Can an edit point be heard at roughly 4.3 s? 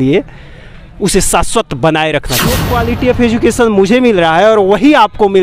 no; 1 cut; at 2.6 s

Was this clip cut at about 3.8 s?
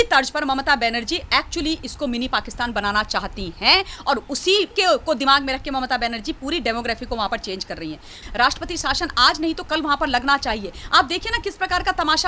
no; 1 cut; at 8.2 s

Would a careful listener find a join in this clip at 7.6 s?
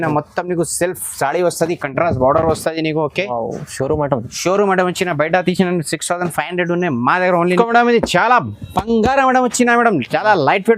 yes; 1 cut; at 7.6 s

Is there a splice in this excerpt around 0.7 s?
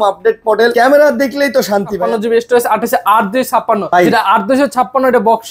yes; 3 cuts; at 0.7 s, 1.9 s, 3.8 s

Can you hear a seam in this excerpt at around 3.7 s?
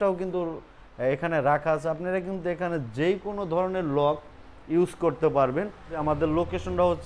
no; 1 cut; at 6.0 s

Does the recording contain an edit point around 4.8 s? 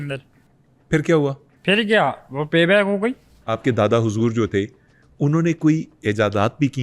no; 1 cut; at 3.2 s

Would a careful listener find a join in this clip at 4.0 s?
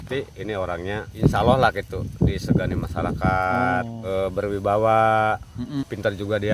yes; 3 cuts; at 1.1 s, 4.0 s, 5.7 s

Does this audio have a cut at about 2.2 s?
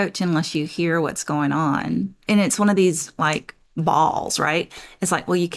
yes; 1 cut; at 2.2 s

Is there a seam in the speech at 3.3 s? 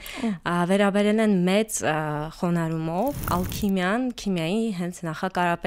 yes; 1 cut; at 3.3 s

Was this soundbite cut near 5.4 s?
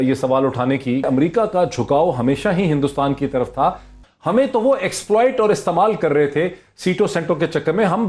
no; 2 cuts; at 1.1 s, 4.0 s

